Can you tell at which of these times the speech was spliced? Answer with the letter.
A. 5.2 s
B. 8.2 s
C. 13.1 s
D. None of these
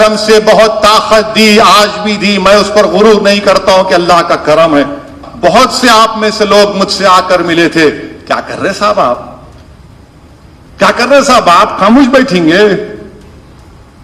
A